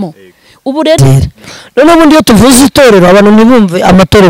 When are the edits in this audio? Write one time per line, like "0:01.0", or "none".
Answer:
0:01.0